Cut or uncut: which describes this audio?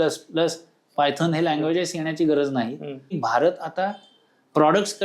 cut